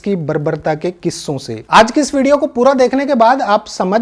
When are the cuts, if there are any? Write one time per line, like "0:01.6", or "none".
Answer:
0:01.6